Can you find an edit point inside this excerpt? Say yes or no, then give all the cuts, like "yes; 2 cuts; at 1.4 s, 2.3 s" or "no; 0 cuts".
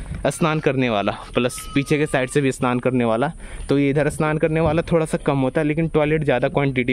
no; 0 cuts